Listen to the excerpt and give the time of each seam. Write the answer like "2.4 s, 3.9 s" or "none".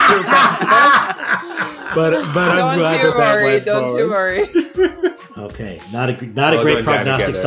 5.3 s